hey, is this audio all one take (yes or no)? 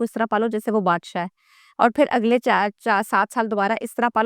yes